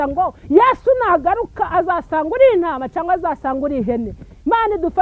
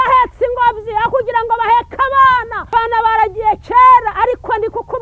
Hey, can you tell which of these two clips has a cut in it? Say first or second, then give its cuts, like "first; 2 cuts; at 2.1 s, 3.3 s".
second; 1 cut; at 2.6 s